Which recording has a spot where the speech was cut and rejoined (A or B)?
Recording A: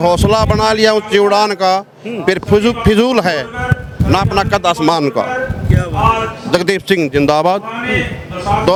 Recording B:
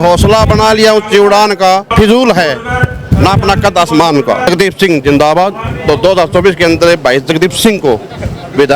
B